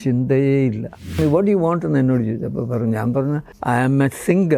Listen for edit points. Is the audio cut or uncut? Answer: cut